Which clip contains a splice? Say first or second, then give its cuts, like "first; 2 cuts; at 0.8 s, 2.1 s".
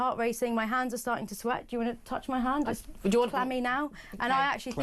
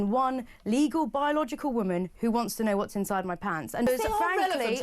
second; 1 cut; at 3.9 s